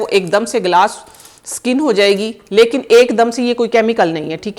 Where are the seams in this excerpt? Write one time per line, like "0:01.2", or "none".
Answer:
none